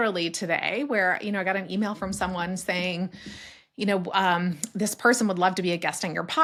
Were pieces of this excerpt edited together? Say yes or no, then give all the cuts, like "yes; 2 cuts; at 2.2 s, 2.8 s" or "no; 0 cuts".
no; 0 cuts